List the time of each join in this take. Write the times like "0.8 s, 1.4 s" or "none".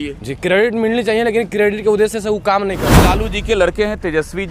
3.0 s